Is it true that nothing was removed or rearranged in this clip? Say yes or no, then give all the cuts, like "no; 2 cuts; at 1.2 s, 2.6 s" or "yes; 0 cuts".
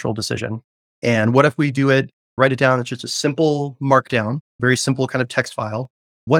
yes; 0 cuts